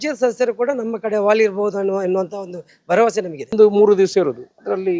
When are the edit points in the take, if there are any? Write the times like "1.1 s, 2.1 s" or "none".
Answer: 3.5 s